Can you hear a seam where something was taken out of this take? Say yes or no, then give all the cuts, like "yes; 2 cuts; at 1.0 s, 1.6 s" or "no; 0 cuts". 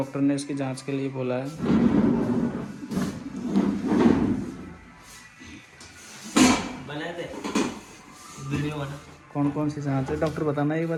no; 0 cuts